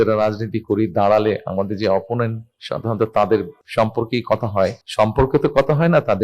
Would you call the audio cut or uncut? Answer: cut